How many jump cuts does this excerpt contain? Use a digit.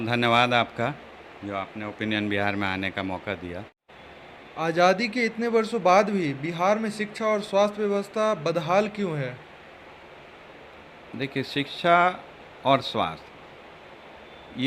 1